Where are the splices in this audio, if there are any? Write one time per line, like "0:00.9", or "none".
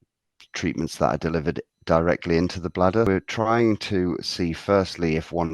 0:03.1